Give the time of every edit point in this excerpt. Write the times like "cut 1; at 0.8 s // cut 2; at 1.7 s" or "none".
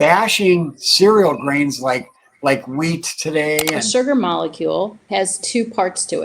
cut 1; at 3.8 s // cut 2; at 5.0 s